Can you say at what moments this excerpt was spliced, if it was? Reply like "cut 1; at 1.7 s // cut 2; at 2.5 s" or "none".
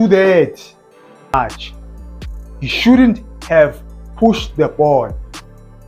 cut 1; at 1.3 s